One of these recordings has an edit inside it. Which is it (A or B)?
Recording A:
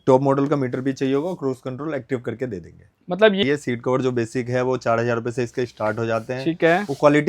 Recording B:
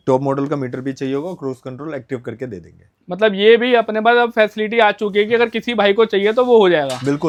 A